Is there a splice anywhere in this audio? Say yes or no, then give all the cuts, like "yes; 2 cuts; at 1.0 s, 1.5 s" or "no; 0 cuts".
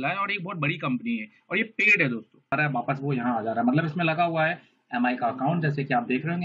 yes; 1 cut; at 2.5 s